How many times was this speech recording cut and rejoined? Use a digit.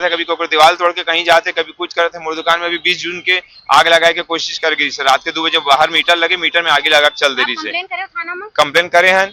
0